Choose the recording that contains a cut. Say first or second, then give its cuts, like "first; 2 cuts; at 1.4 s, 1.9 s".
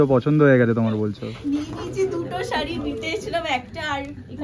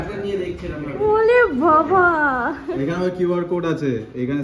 first; 1 cut; at 1.3 s